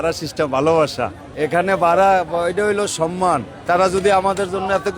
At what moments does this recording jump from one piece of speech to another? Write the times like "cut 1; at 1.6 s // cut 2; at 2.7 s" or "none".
cut 1; at 1.2 s // cut 2; at 3.5 s